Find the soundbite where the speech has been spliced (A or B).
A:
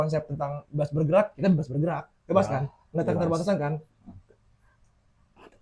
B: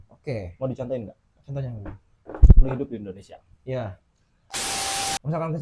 B